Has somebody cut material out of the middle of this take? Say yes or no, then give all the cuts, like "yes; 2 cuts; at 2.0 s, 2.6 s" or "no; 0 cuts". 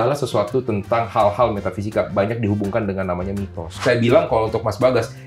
yes; 1 cut; at 3.7 s